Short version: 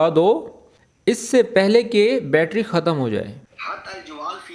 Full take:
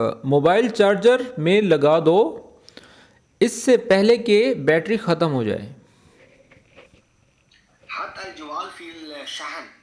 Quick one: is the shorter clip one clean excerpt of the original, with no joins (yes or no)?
no